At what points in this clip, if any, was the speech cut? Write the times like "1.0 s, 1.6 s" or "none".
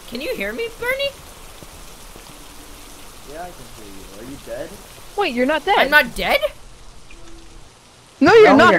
none